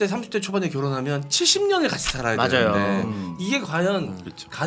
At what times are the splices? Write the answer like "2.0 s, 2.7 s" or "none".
none